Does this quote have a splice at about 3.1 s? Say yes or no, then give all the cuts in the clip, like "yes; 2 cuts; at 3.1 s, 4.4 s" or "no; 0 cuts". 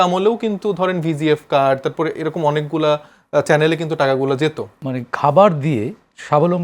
no; 1 cut; at 4.7 s